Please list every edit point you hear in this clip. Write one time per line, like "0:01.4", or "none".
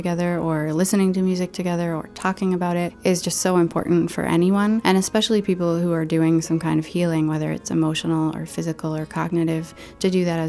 0:02.9
0:04.8